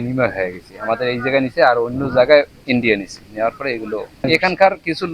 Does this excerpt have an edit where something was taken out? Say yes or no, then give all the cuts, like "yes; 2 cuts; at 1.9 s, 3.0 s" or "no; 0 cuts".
yes; 1 cut; at 4.2 s